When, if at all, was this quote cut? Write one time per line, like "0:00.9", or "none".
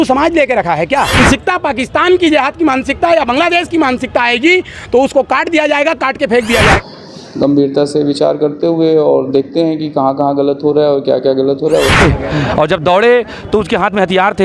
0:01.2
0:06.8
0:12.0